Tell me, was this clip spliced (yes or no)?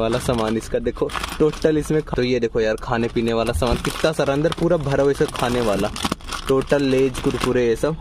yes